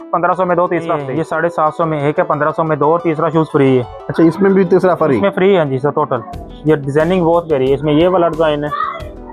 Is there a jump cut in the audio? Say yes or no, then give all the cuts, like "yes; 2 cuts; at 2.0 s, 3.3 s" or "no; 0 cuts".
yes; 1 cut; at 1.1 s